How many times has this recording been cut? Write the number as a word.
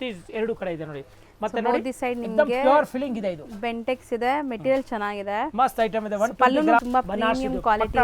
one